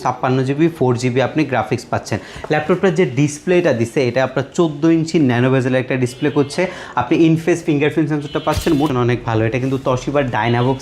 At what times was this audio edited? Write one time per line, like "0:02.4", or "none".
0:08.9